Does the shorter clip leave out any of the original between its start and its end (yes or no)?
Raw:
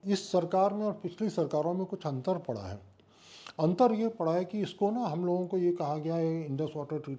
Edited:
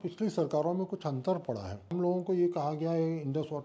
yes